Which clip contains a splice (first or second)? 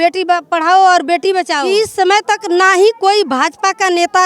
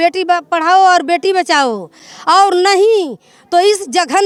first